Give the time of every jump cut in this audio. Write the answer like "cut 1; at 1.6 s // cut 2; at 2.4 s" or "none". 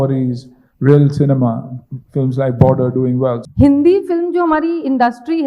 cut 1; at 3.4 s